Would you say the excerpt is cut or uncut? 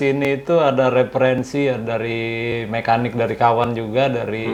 uncut